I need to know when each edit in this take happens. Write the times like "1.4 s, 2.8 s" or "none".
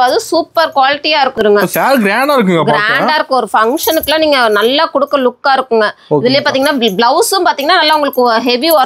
1.4 s